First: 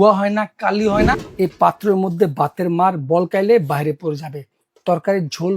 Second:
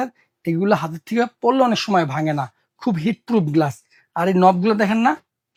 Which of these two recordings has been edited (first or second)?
first